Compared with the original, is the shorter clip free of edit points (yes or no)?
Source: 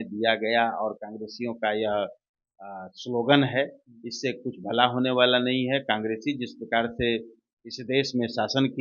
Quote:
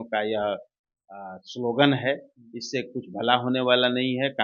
yes